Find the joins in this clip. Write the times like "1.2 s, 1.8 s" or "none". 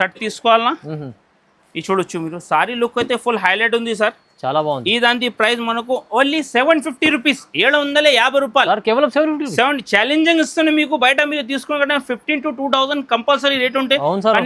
none